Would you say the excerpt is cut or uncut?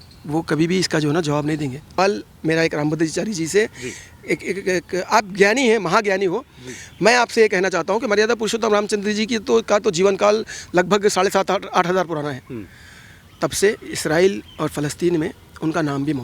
cut